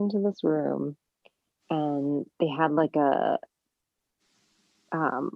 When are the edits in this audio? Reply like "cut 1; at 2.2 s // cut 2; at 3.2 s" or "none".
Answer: none